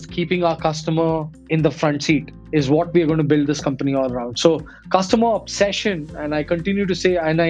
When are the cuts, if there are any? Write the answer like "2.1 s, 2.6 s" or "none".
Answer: 2.3 s